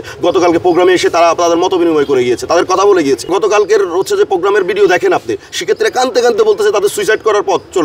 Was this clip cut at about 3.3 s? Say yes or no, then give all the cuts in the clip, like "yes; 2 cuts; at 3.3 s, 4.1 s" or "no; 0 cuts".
yes; 1 cut; at 3.3 s